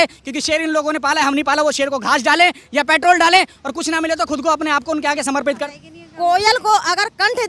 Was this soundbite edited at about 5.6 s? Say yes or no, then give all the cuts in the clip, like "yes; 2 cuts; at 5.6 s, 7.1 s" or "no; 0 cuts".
yes; 1 cut; at 5.6 s